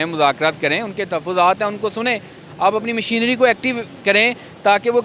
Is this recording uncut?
yes; 0 cuts

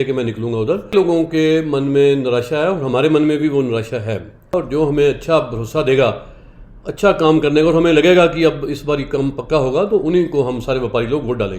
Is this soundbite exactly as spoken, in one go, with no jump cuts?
no; 2 cuts; at 0.9 s, 4.5 s

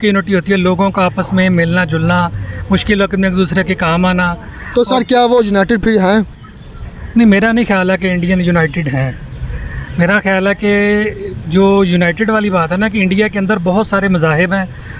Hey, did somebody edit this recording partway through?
no; 0 cuts

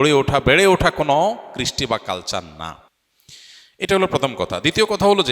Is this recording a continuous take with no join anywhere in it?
yes; 0 cuts

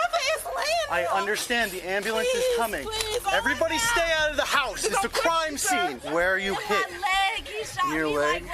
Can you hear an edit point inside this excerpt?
yes; 2 cuts; at 3.2 s, 6.0 s

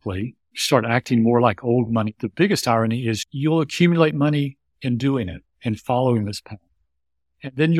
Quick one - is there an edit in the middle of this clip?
yes; 2 cuts; at 2.2 s, 3.3 s

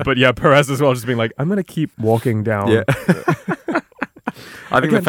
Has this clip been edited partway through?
yes; 1 cut; at 1.9 s

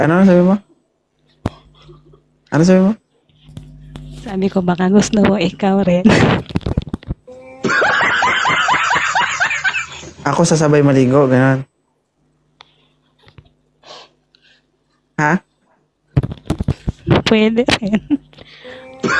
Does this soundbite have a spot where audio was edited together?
no; 0 cuts

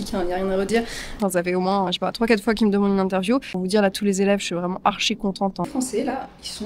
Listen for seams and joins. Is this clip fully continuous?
no; 3 cuts; at 1.2 s, 3.6 s, 5.7 s

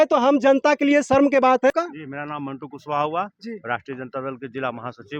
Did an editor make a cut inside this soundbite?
yes; 1 cut; at 1.7 s

